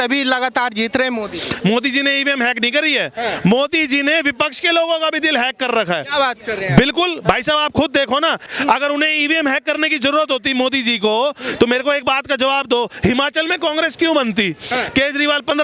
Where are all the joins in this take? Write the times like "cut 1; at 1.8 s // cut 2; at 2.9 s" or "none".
cut 1; at 8.4 s